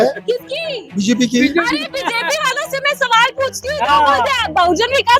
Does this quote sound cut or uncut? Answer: uncut